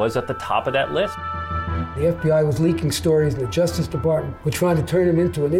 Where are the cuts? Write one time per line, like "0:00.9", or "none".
0:01.7
0:04.4